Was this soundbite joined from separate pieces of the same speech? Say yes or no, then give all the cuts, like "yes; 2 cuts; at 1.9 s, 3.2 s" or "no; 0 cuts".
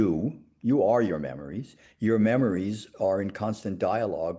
no; 0 cuts